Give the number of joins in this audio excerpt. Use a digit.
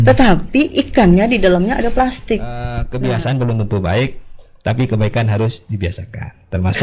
1